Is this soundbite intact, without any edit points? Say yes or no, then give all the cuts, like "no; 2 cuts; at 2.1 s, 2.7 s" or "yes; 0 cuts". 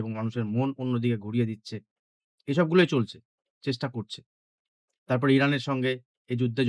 yes; 0 cuts